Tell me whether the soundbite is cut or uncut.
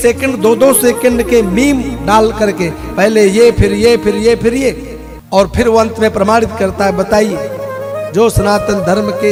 uncut